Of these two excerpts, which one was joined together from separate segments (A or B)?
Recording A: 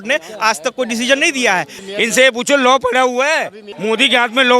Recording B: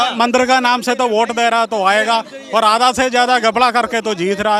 A